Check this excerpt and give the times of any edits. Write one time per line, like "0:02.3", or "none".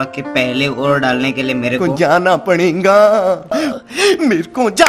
0:01.8